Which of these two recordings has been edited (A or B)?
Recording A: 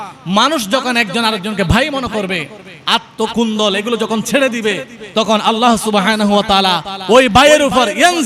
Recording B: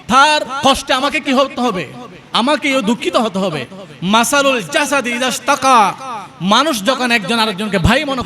B